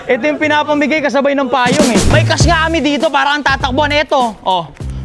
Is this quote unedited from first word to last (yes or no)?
no